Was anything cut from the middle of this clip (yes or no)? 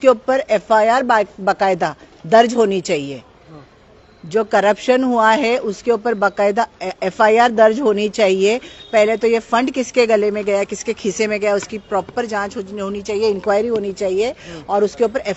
no